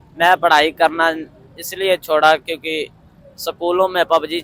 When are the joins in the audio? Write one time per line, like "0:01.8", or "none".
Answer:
none